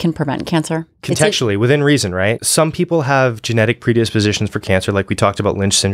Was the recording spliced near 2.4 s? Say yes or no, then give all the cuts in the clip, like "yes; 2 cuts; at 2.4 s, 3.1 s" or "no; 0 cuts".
yes; 2 cuts; at 0.9 s, 2.4 s